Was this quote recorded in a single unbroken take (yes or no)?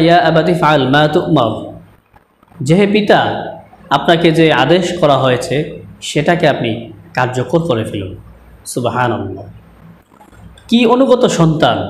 yes